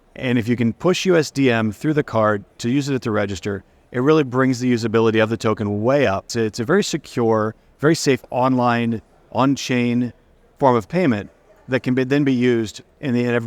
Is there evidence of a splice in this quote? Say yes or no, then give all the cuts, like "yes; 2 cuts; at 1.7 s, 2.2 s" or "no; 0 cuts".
yes; 1 cut; at 6.3 s